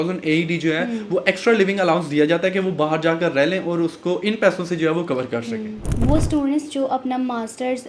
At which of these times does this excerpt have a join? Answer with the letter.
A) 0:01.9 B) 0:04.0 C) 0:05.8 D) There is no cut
C